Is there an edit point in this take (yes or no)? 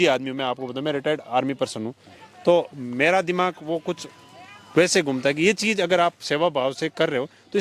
no